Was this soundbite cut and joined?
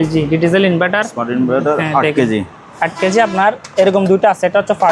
no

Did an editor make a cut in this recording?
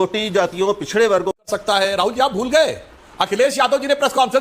yes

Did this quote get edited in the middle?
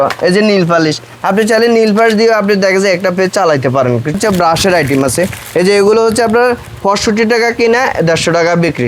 yes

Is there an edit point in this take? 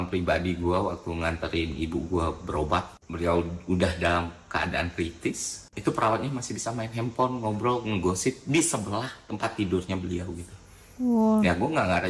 no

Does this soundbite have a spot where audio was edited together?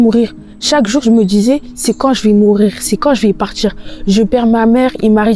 no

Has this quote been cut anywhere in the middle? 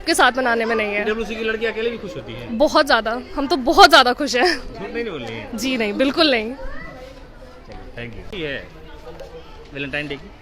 no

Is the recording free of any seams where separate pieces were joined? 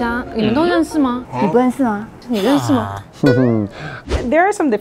no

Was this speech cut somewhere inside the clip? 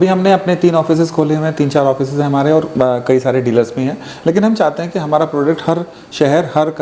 no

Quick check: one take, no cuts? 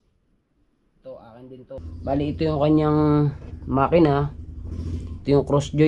no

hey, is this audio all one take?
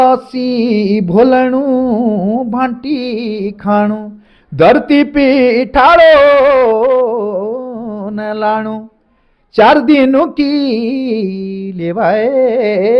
yes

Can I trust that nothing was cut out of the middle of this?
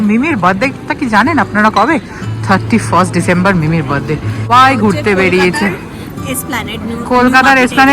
no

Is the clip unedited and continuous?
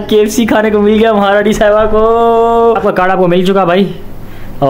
no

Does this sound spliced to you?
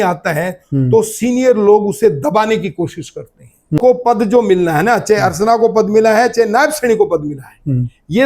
yes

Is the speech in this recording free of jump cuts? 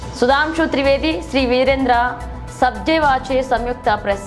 yes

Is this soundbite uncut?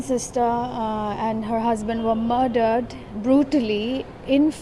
yes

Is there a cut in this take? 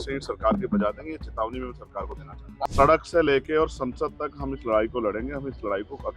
yes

